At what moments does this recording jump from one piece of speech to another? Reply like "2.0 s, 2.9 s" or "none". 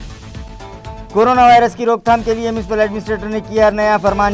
1.1 s

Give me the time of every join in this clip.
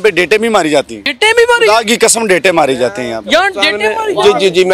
1.0 s

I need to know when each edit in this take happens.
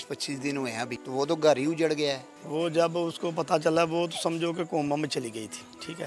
1.0 s, 2.3 s

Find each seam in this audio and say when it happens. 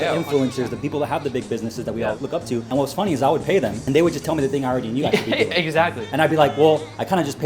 0.8 s, 2.4 s, 3.8 s

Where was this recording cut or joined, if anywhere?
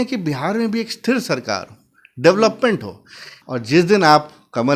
3.3 s

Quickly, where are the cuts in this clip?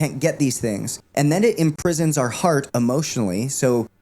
0.9 s

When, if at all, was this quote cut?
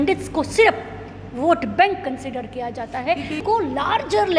3.4 s

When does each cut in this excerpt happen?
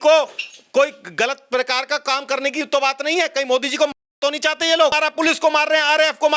4.9 s

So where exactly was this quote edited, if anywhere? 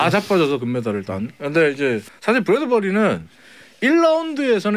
2.1 s

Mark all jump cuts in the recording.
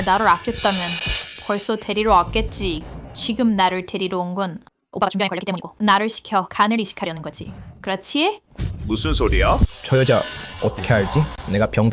9.7 s

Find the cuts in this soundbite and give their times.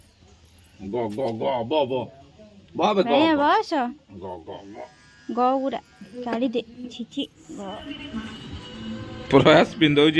7.7 s

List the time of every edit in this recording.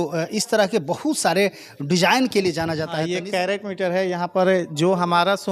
2.9 s

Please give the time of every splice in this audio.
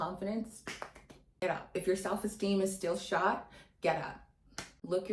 none

